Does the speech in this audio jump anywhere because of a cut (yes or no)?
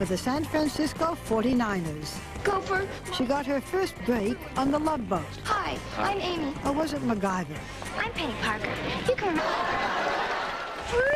no